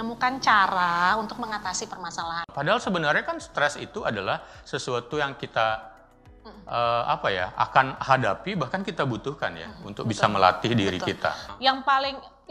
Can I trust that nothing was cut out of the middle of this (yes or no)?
no